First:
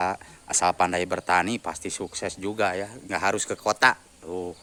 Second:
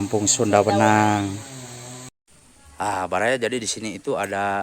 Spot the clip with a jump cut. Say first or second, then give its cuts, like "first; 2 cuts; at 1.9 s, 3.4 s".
second; 1 cut; at 2.1 s